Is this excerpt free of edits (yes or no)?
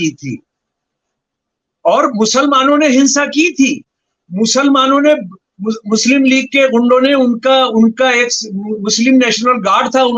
yes